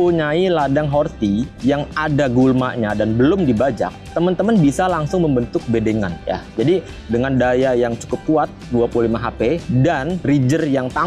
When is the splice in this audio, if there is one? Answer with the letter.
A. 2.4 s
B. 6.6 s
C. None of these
C